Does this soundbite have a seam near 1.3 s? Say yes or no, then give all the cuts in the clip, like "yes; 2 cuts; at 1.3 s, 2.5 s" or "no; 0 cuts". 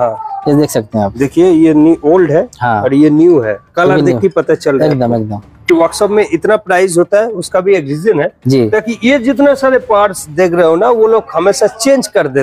no; 1 cut; at 5.7 s